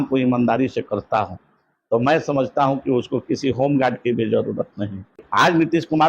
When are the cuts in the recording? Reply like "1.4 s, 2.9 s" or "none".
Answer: 5.2 s